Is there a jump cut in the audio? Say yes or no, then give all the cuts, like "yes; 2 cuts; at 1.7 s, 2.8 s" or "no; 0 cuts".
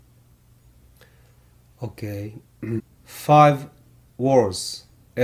no; 0 cuts